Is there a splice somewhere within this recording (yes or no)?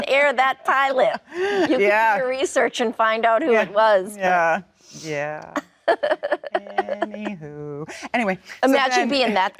no